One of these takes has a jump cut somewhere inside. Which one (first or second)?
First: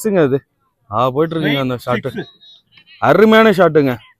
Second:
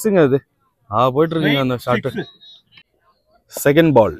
second